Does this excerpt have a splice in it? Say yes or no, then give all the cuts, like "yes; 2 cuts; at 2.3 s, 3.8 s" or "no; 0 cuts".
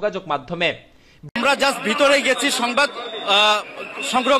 yes; 1 cut; at 1.3 s